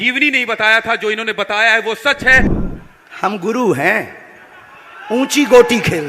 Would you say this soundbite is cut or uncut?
cut